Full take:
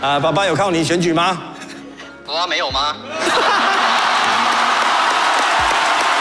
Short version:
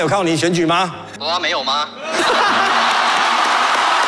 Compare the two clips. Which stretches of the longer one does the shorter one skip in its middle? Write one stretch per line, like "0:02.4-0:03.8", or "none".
0:01.5-0:02.1

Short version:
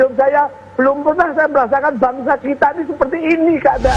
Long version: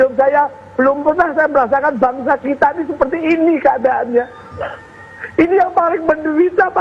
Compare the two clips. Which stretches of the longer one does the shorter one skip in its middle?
none

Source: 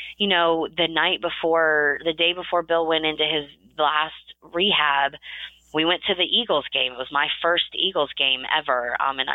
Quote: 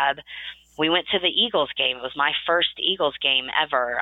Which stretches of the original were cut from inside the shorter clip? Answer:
none

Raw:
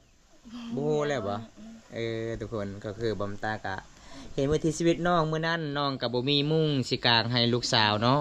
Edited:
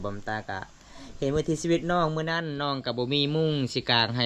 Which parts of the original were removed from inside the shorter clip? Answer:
none

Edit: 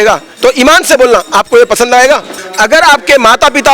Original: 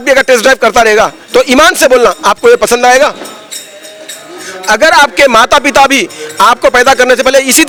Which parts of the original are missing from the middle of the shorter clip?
0:03.3-0:04.5

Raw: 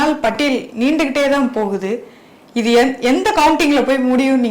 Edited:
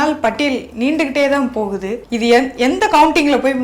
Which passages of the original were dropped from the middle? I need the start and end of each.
0:02.0-0:02.4

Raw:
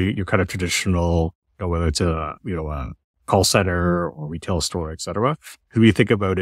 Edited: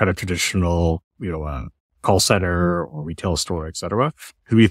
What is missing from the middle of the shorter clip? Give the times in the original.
0:01.4-0:02.4

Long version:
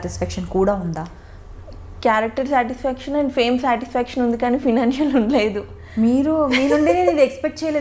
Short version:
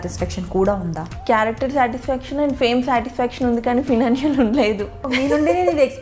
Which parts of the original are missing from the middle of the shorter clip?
0:01.1-0:01.8
0:05.9-0:06.5

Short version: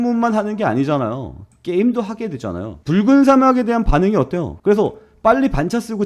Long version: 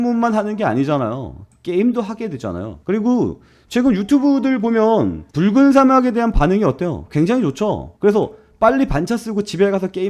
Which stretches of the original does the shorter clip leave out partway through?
0:02.7-0:05.2
0:07.0-0:07.9

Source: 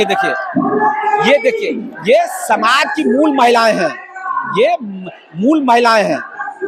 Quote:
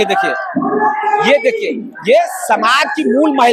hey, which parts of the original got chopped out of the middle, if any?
none

